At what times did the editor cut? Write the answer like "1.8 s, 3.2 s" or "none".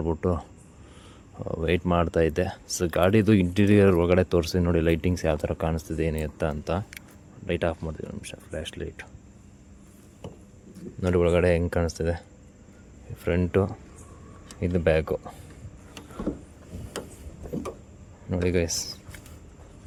none